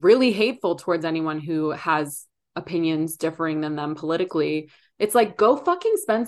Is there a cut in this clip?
no; 0 cuts

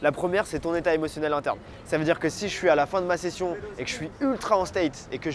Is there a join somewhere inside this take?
no; 0 cuts

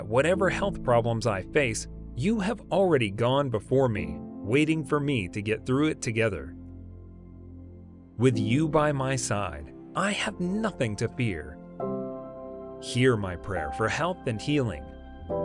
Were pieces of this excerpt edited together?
yes; 2 cuts; at 6.6 s, 8.1 s

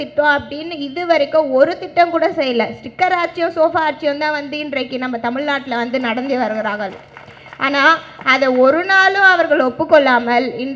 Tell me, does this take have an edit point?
no; 0 cuts

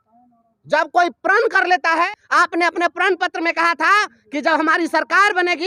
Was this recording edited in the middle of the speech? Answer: yes; 1 cut; at 2.1 s

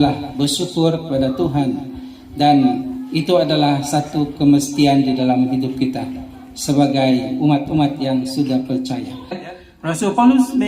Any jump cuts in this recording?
yes; 1 cut; at 9.4 s

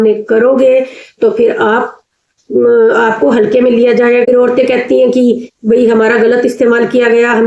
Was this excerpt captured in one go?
no; 1 cut; at 4.2 s

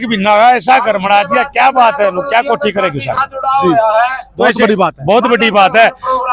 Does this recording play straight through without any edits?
yes; 0 cuts

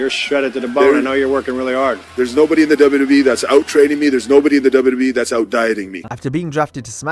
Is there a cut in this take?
no; 0 cuts

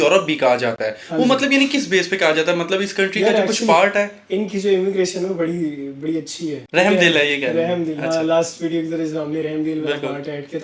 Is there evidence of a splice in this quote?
no; 0 cuts

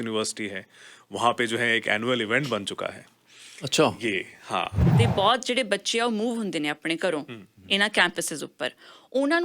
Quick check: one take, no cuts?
no; 1 cut; at 4.8 s

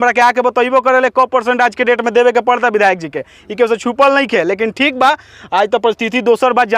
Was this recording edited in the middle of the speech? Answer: no; 0 cuts

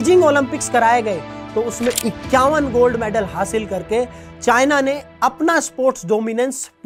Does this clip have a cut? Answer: no; 0 cuts

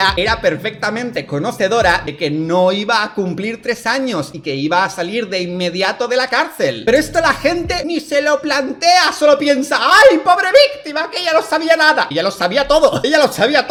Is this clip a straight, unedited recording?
yes; 0 cuts

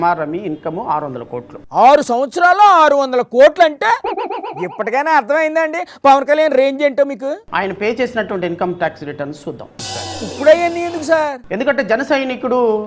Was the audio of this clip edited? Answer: no; 0 cuts

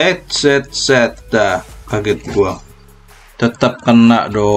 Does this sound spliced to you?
no; 0 cuts

